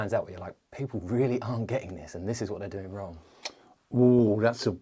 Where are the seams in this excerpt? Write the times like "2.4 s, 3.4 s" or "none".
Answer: none